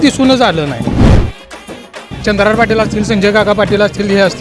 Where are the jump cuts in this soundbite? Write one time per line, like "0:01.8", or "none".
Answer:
none